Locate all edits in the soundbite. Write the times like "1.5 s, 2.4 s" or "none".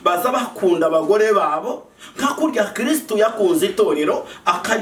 none